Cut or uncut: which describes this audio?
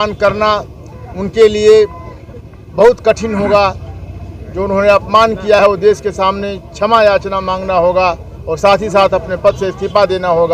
uncut